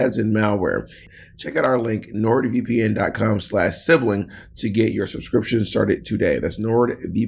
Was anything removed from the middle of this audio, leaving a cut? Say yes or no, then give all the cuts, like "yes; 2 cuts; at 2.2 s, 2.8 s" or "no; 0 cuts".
yes; 1 cut; at 1.0 s